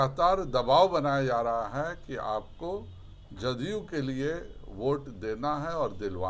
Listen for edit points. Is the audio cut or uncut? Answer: uncut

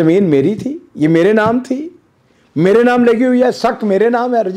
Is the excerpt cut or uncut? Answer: uncut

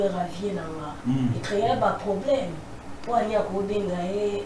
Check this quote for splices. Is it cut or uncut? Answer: uncut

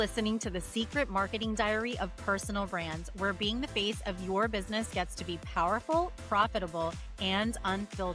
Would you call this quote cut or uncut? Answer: uncut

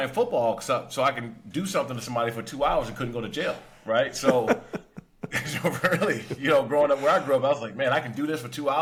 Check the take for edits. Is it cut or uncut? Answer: uncut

